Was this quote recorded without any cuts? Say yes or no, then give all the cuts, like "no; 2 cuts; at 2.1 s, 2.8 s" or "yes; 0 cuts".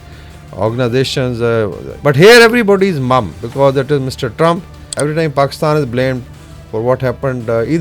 no; 2 cuts; at 1.9 s, 5.0 s